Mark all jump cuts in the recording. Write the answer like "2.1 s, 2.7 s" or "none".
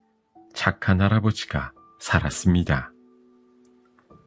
none

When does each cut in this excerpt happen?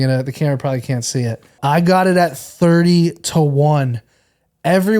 1.5 s

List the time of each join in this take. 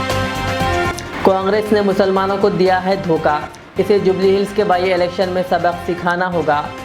1.0 s

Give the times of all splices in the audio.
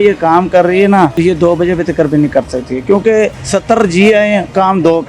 1.1 s, 3.4 s

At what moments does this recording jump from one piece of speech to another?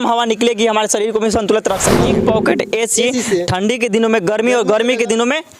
2.1 s

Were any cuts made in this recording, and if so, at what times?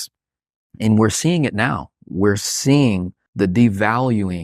3.2 s

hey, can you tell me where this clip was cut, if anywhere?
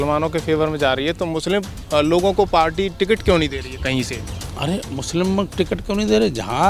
none

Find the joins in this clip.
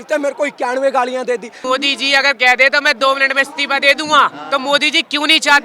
1.6 s

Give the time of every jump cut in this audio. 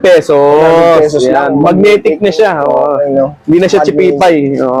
none

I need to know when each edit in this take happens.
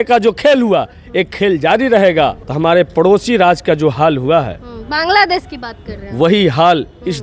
2.4 s

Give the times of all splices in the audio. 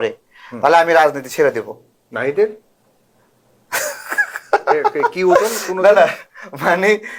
none

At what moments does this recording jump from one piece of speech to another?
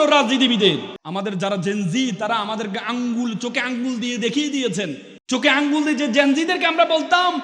1.0 s, 5.1 s

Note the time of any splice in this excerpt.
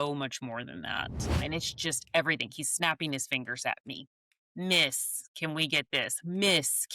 1.4 s

